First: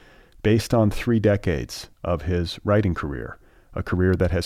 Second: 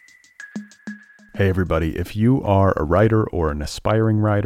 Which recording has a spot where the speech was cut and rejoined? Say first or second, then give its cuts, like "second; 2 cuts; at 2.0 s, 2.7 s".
second; 1 cut; at 0.9 s